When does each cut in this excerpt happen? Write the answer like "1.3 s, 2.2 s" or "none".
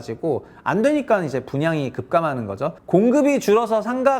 2.8 s